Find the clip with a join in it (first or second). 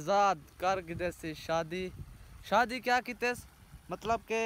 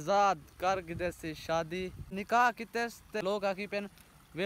second